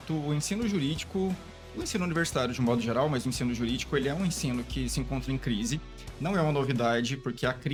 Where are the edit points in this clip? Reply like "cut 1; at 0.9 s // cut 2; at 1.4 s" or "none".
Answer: none